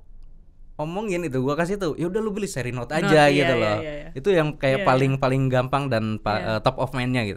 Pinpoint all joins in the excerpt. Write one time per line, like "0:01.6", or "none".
none